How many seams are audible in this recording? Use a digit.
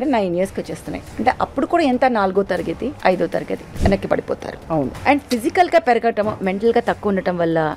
3